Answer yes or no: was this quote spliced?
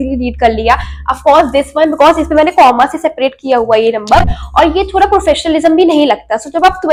no